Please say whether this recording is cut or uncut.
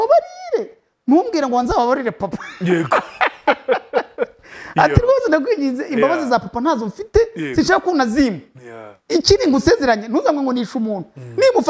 uncut